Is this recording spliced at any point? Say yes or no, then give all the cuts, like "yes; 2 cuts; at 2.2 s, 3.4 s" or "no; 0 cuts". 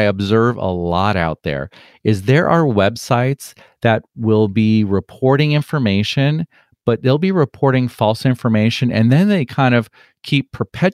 no; 0 cuts